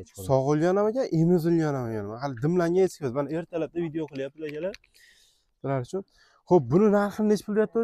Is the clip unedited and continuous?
yes; 0 cuts

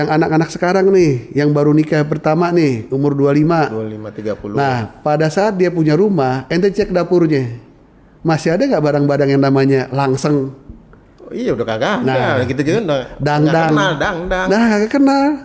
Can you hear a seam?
no; 0 cuts

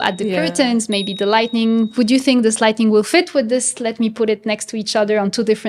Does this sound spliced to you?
no; 0 cuts

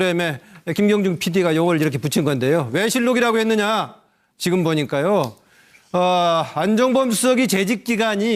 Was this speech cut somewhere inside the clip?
no; 0 cuts

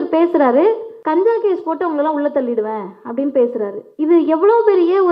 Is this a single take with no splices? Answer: no; 1 cut; at 0.9 s

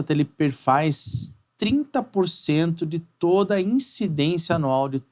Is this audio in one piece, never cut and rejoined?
yes; 0 cuts

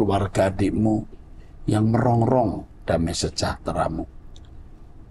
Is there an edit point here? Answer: no; 0 cuts

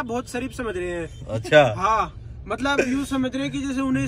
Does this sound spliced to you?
no; 0 cuts

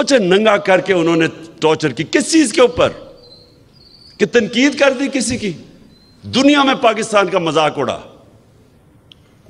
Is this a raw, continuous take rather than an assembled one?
yes; 0 cuts

